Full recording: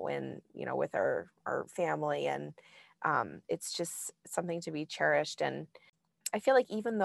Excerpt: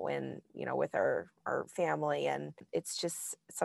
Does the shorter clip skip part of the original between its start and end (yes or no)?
yes